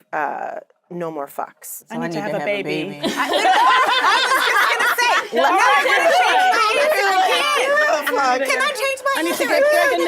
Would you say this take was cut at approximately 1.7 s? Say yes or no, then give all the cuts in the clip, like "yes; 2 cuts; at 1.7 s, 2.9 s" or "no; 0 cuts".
yes; 1 cut; at 1.7 s